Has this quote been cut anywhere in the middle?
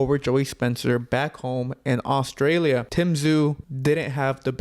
yes; 2 cuts; at 2.9 s, 3.7 s

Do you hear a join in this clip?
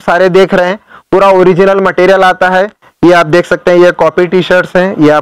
yes; 1 cut; at 2.8 s

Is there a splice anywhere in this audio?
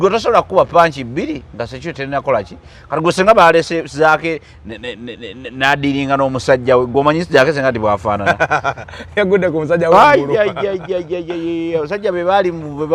no; 0 cuts

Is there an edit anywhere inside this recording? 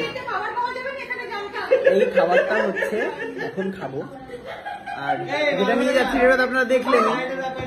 no; 0 cuts

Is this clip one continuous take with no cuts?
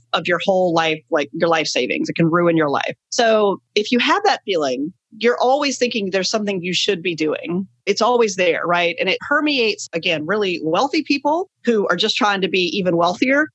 no; 1 cut; at 3.0 s

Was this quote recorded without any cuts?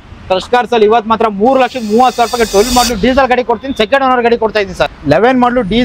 no; 1 cut; at 4.9 s

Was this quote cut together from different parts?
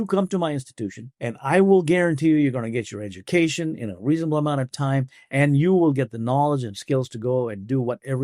yes; 1 cut; at 1.1 s

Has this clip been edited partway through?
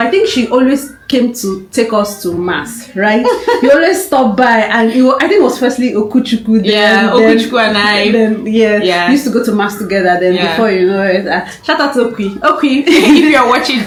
no; 0 cuts

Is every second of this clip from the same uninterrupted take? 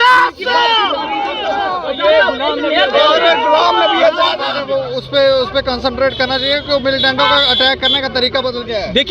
no; 1 cut; at 4.6 s

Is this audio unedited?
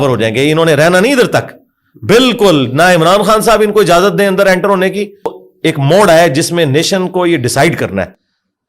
no; 1 cut; at 5.4 s

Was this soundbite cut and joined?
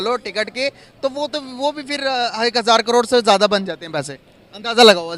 no; 0 cuts

